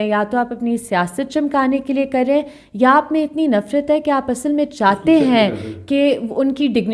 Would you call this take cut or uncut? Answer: uncut